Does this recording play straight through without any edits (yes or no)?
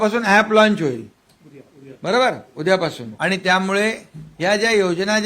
no